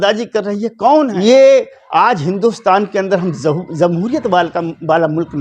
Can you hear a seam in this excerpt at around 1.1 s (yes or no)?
yes